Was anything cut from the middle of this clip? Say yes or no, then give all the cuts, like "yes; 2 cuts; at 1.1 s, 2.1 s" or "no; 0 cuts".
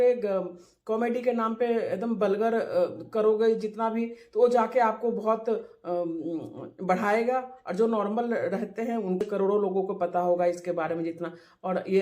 yes; 1 cut; at 9.2 s